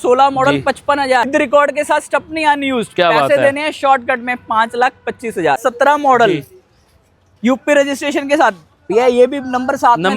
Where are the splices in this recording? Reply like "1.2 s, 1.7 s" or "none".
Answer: 1.3 s, 5.6 s